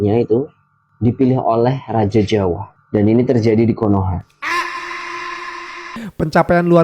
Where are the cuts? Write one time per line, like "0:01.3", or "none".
0:02.7
0:06.0